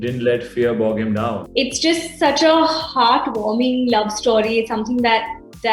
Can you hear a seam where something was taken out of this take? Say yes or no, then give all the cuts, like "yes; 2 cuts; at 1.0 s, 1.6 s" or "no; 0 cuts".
yes; 1 cut; at 1.4 s